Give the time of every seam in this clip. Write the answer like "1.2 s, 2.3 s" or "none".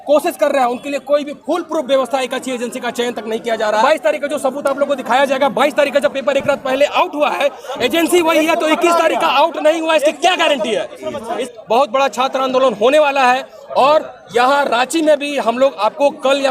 3.8 s, 11.4 s